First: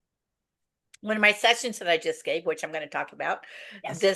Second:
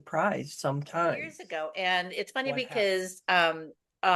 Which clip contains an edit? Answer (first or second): second